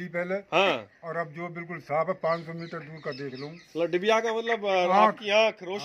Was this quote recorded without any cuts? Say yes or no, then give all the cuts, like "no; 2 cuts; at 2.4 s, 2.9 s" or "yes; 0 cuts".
yes; 0 cuts